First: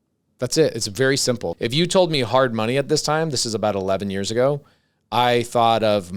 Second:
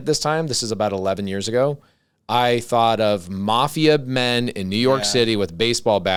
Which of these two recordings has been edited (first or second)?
first